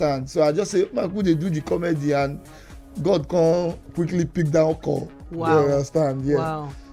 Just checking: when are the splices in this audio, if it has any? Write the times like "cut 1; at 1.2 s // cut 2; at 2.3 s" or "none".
none